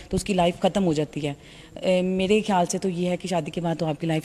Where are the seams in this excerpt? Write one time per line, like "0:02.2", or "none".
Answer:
none